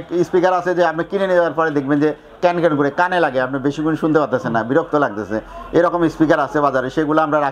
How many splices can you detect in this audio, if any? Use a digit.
0